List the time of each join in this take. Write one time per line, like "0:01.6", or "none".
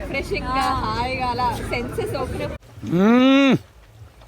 0:02.7